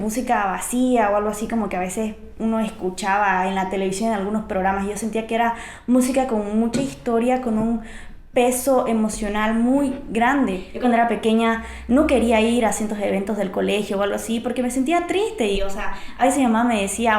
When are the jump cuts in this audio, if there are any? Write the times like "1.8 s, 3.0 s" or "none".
10.7 s

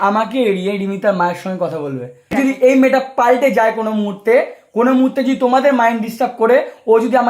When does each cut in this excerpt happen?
2.3 s

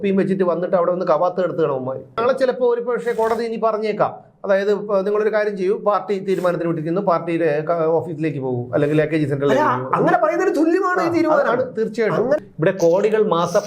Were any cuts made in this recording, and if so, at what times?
2.2 s, 12.4 s

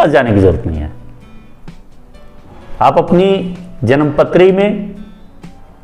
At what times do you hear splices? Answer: none

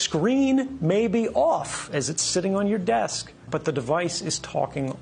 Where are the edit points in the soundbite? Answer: 3.4 s

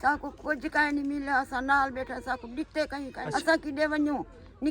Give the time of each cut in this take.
3.2 s

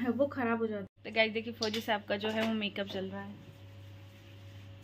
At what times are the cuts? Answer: 1.0 s

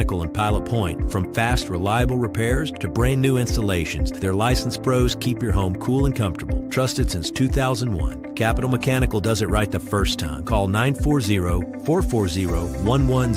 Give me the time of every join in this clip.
none

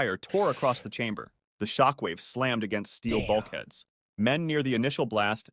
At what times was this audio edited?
none

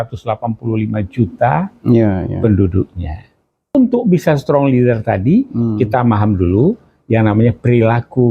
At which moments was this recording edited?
3.7 s

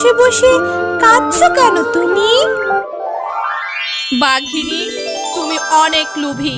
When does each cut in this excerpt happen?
2.8 s

